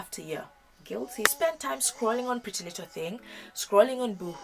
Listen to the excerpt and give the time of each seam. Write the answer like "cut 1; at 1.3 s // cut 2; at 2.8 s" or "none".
cut 1; at 1.3 s